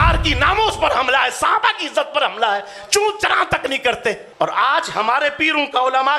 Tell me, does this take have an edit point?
yes; 1 cut; at 4.3 s

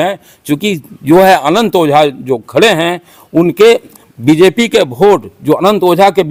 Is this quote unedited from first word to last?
yes; 0 cuts

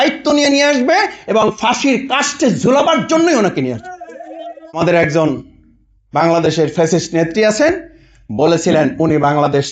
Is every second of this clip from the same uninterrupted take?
no; 1 cut; at 4.8 s

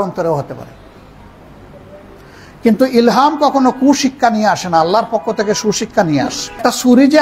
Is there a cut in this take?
no; 0 cuts

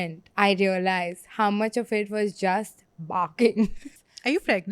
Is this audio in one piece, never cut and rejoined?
no; 1 cut; at 3.8 s

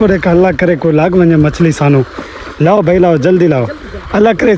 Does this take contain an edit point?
no; 0 cuts

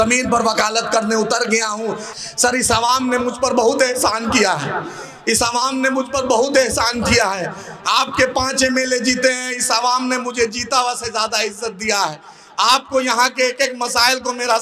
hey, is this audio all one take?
no; 1 cut; at 2.0 s

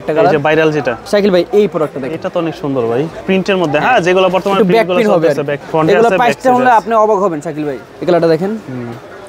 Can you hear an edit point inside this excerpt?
yes; 4 cuts; at 1.0 s, 3.2 s, 5.6 s, 7.8 s

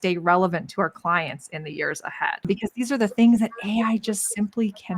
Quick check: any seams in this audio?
yes; 1 cut; at 2.4 s

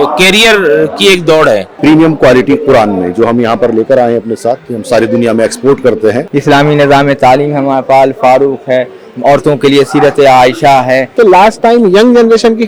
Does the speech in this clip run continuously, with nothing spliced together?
no; 3 cuts; at 1.7 s, 6.2 s, 11.1 s

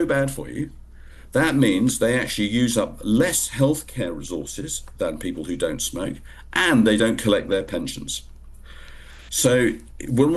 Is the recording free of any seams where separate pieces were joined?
yes; 0 cuts

